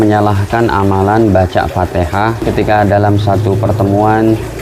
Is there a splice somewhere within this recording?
yes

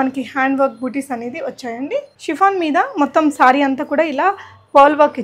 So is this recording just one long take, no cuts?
no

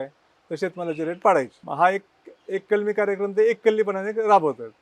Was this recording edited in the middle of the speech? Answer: no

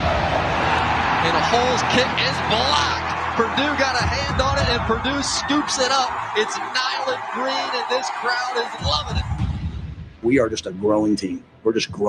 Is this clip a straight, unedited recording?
yes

